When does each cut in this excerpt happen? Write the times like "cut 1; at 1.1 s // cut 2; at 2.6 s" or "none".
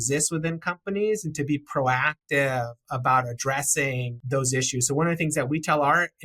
cut 1; at 4.2 s